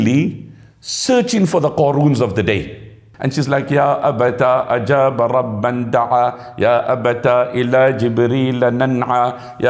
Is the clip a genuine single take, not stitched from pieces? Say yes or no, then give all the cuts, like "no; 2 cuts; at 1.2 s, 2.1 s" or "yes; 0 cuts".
no; 1 cut; at 3.0 s